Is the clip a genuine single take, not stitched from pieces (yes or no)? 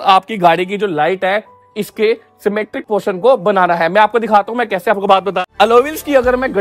no